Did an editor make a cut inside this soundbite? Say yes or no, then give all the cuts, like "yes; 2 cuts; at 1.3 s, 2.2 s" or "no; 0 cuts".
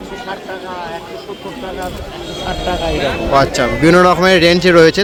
no; 0 cuts